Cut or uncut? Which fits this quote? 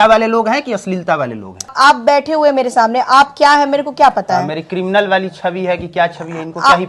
cut